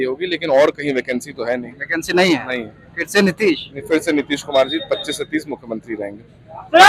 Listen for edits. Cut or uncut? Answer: uncut